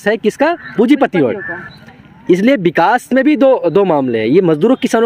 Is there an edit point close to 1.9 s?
no; 0 cuts

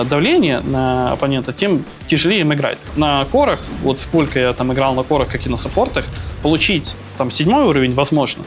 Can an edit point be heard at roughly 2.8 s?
yes; 1 cut; at 2.8 s

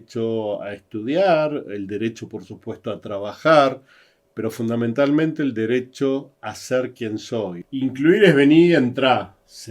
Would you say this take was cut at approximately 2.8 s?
no; 1 cut; at 7.6 s

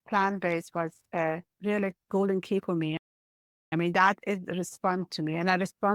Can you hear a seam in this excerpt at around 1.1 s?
yes; 1 cut; at 1.1 s

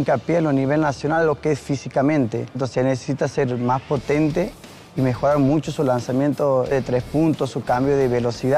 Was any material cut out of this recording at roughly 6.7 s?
yes; 2 cuts; at 2.5 s, 6.7 s

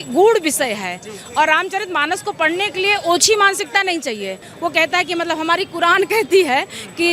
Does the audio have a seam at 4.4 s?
yes; 1 cut; at 4.4 s

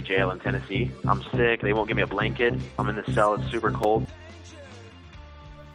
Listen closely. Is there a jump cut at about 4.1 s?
no; 0 cuts

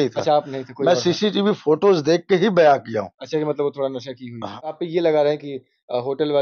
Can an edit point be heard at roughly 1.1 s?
no; 1 cut; at 4.6 s

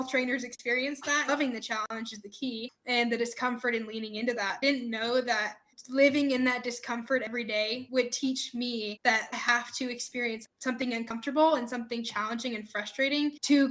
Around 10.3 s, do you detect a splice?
no; 3 cuts; at 1.3 s, 4.6 s, 7.8 s

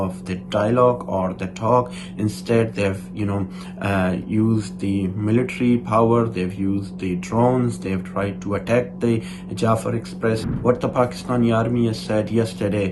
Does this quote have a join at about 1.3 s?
no; 1 cut; at 10.5 s

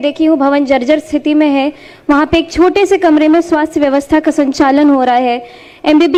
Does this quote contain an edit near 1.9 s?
no; 0 cuts

